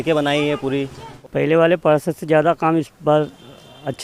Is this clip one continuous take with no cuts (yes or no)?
no